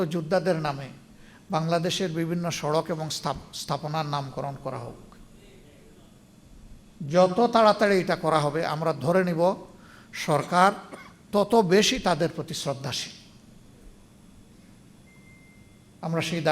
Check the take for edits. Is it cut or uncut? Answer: uncut